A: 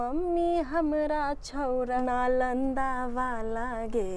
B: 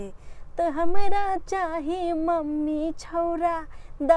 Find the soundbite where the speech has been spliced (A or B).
A